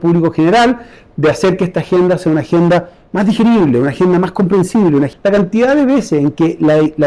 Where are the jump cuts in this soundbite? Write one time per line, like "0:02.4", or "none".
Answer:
0:05.1